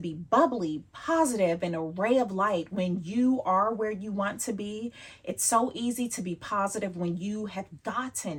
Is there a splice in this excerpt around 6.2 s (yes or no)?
no